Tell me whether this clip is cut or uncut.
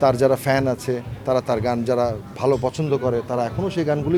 uncut